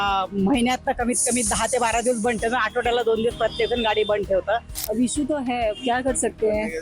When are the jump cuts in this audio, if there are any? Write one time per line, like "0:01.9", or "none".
0:04.8